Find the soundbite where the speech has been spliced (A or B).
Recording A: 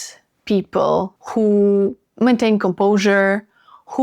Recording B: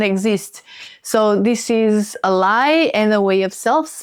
A